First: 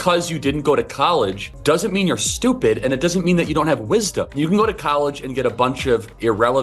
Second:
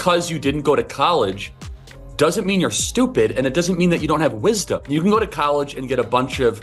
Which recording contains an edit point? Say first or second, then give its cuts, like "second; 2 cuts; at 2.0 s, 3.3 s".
first; 1 cut; at 1.5 s